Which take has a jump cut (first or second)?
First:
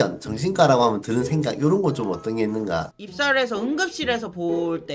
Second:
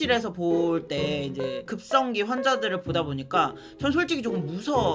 first